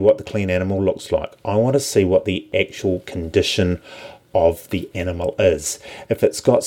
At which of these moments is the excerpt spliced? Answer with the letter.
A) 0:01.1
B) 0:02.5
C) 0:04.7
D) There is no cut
B